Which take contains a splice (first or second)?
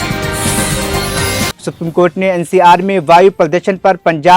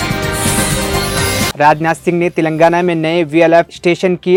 first